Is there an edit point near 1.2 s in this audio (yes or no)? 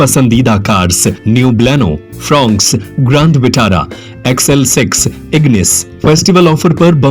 yes